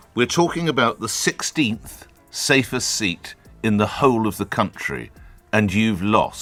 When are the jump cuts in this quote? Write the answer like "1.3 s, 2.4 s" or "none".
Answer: none